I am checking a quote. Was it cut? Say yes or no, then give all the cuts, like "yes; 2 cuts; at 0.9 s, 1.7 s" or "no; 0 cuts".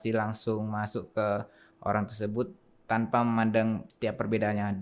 yes; 1 cut; at 3.9 s